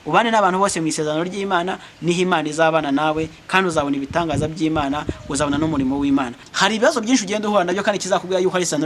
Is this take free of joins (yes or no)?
no